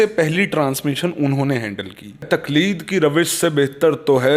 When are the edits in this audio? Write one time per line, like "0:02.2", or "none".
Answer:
0:02.3